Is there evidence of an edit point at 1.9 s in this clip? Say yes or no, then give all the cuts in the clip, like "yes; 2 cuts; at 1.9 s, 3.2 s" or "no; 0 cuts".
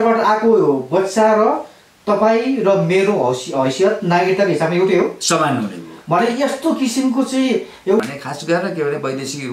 no; 1 cut; at 8.0 s